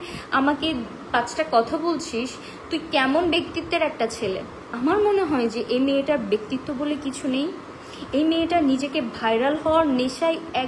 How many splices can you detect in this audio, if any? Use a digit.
1